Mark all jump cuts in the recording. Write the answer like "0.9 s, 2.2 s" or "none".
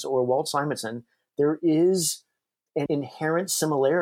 2.9 s